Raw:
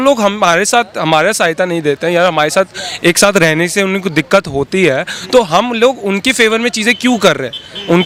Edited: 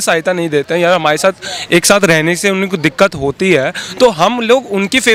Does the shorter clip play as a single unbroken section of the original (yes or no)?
yes